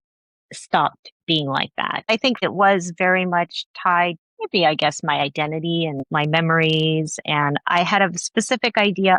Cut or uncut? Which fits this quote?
cut